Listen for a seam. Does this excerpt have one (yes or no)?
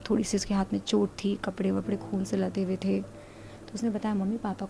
no